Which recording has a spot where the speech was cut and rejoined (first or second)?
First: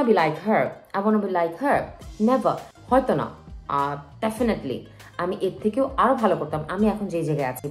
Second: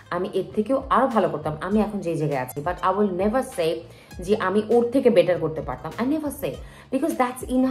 first